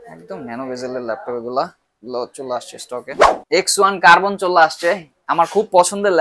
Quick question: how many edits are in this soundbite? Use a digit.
1